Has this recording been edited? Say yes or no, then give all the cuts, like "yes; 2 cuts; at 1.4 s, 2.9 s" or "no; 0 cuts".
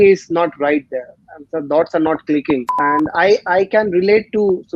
yes; 1 cut; at 2.8 s